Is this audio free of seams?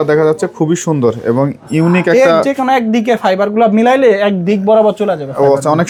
yes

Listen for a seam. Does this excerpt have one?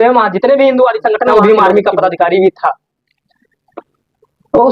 yes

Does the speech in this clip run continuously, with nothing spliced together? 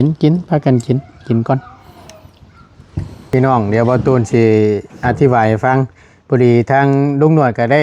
no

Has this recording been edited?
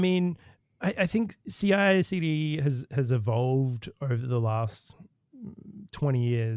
no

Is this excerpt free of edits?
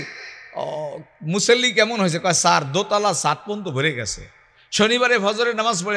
yes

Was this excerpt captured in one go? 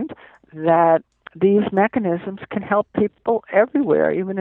no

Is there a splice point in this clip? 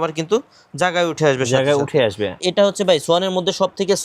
yes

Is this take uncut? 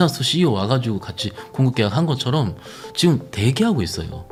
yes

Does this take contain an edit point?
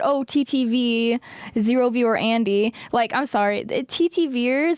no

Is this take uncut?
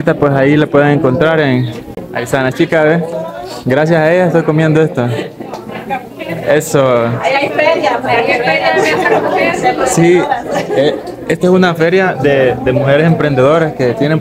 yes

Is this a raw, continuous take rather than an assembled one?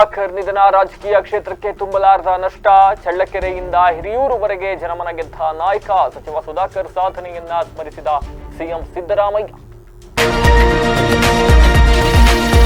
no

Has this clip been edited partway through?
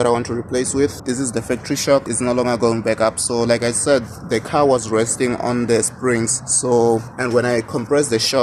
yes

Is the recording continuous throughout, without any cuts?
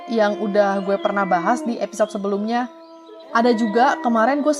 no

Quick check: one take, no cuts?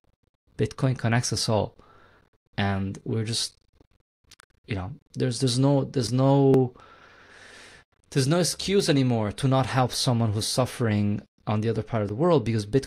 yes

